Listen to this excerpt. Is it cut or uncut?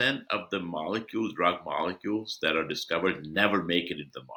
uncut